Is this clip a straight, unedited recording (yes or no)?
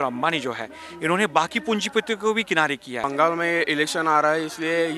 no